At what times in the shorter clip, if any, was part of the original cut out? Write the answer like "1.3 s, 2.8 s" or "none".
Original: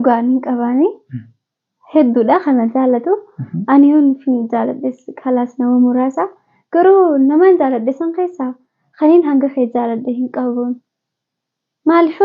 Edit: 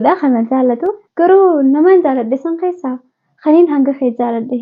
1.0 s